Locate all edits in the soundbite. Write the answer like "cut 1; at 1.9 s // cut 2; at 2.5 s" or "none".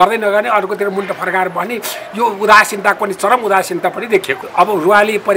cut 1; at 4.4 s